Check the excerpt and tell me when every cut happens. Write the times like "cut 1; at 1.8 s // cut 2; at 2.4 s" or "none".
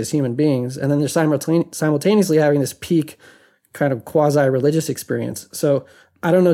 none